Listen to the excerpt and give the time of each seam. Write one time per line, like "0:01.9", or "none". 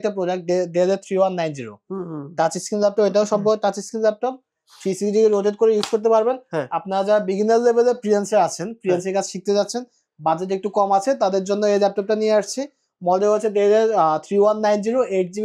none